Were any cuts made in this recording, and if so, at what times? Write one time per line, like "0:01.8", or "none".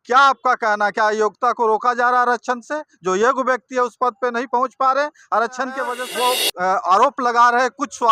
0:06.0

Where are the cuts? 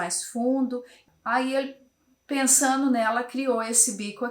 0:01.0

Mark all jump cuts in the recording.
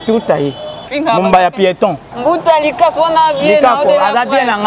0:00.9
0:02.1

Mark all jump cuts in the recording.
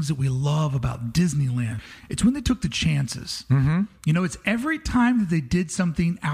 0:01.8

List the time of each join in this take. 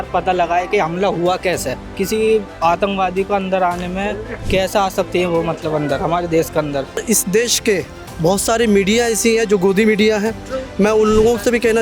0:01.9
0:07.0

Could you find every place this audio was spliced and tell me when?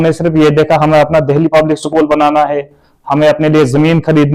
none

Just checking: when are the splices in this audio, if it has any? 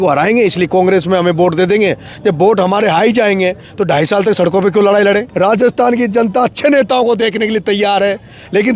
0:05.3

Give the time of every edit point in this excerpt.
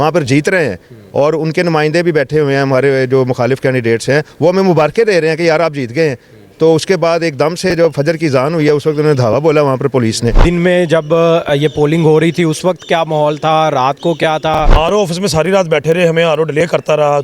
0:10.4
0:14.7

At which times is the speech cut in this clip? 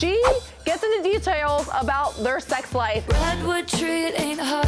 0:03.0

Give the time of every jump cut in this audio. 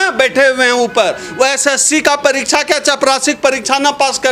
none

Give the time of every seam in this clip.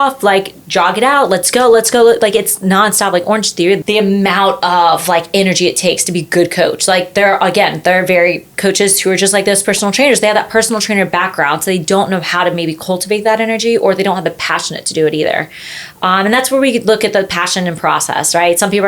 0:03.8

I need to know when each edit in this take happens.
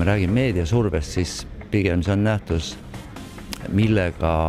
none

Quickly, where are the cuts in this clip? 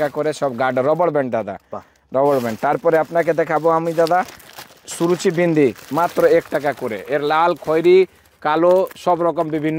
none

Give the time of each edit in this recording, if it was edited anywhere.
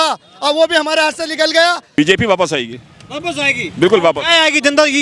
0:01.9

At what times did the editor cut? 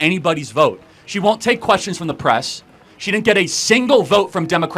0:00.9

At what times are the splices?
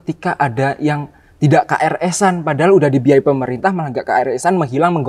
none

